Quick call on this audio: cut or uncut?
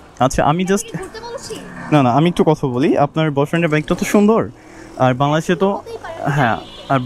uncut